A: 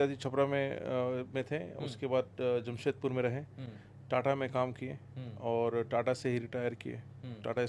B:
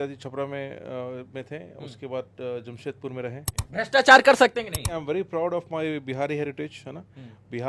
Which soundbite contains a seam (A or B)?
B